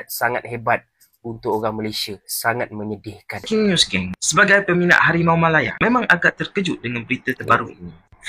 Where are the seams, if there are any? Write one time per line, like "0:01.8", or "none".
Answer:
0:03.5